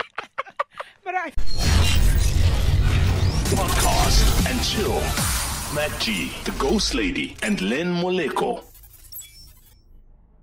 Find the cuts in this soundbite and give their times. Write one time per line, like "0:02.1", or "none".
0:01.3

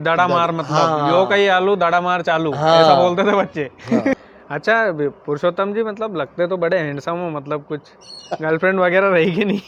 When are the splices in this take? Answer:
0:04.2

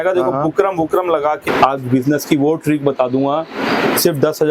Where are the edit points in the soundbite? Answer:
0:01.4

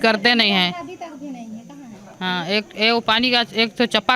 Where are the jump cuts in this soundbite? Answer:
none

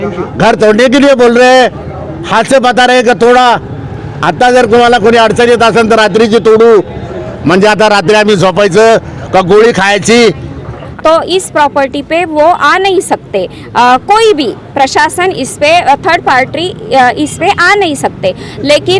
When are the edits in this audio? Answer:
0:10.8

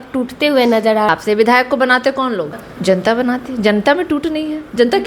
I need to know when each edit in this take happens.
0:01.1
0:02.6

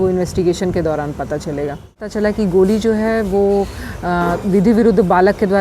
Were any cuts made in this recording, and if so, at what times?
0:02.1

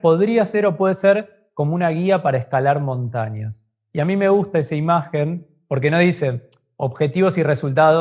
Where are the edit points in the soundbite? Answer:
none

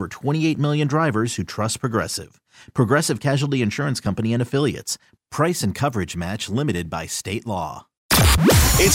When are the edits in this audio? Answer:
0:07.9

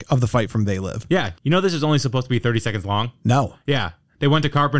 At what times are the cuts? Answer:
none

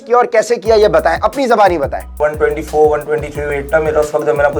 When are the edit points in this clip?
0:02.2

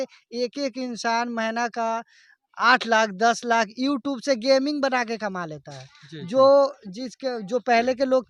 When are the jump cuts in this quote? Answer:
none

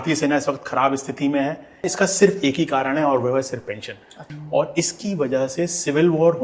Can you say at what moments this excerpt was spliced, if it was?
0:01.9
0:04.2

